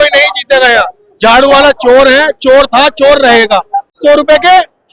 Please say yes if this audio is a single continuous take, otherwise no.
no